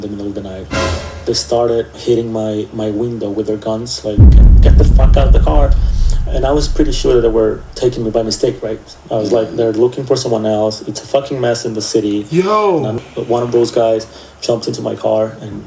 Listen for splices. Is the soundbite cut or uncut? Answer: cut